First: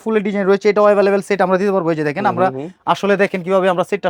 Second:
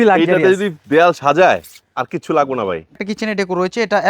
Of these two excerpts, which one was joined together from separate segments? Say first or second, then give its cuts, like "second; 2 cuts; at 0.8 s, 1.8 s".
second; 1 cut; at 3.1 s